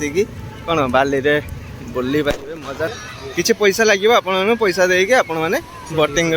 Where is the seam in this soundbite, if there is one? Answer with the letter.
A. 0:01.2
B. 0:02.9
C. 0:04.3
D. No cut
B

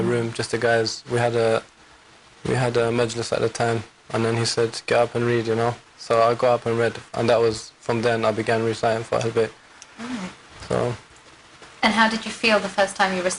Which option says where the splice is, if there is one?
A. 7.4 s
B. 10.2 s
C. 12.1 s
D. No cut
B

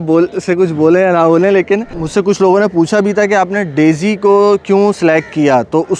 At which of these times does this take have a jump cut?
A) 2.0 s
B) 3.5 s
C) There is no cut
A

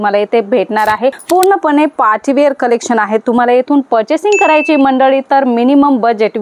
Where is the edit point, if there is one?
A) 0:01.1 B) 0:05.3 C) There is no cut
A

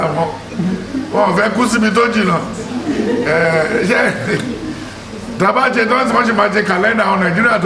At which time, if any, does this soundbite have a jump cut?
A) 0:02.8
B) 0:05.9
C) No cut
C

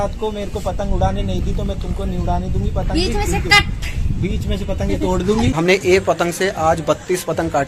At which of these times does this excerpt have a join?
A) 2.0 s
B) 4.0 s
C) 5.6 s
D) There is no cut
C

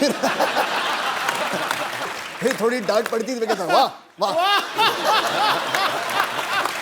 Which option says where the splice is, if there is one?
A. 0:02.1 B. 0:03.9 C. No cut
A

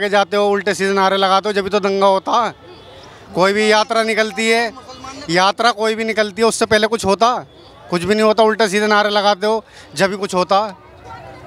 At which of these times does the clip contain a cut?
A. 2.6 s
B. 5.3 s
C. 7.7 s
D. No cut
D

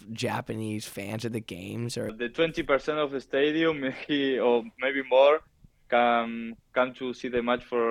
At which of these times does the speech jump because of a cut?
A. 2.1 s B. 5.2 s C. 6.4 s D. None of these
A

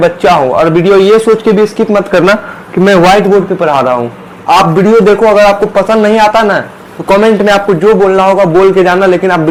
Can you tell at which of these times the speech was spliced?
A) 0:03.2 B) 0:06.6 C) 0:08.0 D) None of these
D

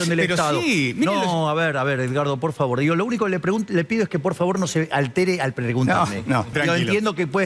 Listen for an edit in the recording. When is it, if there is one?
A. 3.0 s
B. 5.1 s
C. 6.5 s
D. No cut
C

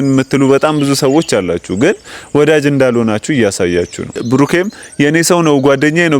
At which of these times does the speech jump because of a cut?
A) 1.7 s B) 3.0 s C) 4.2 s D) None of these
C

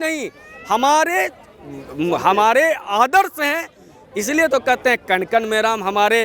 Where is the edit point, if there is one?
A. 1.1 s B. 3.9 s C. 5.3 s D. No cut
D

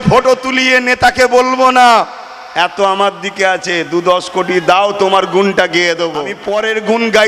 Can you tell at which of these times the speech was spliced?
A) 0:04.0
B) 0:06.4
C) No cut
B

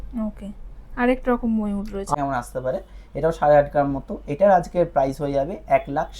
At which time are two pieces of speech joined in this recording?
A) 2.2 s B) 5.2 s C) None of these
A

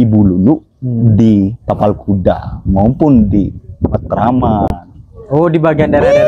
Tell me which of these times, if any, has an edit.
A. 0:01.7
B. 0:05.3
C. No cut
C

